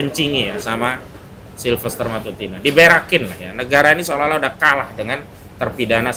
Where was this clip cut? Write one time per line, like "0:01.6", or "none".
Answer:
none